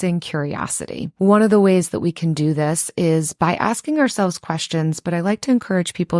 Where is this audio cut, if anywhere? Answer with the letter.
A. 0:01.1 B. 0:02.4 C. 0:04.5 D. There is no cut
A